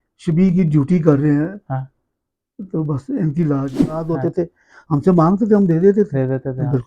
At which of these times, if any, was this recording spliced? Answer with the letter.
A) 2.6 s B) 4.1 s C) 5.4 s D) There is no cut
B